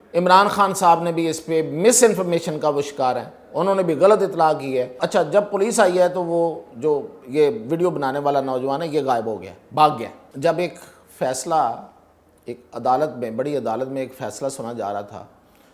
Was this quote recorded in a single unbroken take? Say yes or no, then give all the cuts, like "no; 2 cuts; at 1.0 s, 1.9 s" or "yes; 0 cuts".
no; 2 cuts; at 5.0 s, 10.2 s